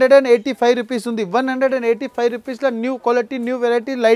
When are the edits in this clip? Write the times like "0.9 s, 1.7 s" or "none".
none